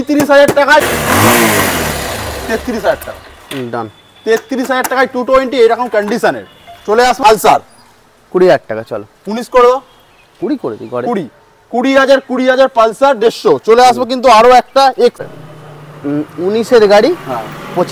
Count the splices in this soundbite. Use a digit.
3